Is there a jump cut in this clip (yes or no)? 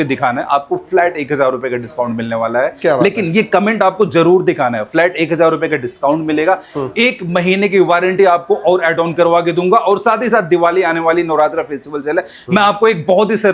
no